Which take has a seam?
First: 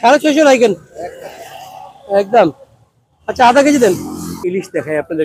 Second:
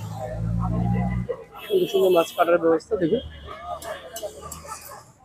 first; 1 cut; at 4.3 s

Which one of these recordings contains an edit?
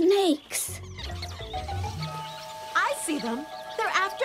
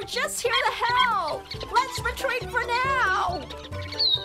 first; 1 cut; at 1.0 s

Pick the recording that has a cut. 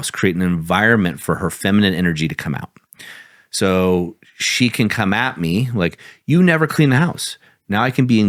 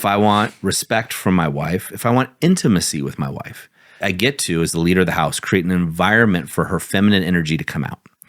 second; 1 cut; at 4.0 s

